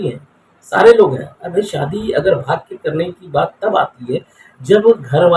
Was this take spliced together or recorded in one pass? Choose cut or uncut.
uncut